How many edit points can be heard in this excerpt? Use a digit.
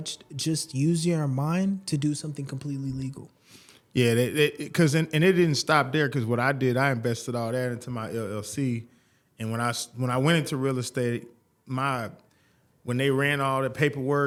0